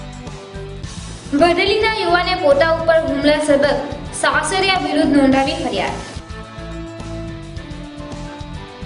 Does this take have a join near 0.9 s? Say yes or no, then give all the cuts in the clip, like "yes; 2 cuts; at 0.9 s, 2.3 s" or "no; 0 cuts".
no; 0 cuts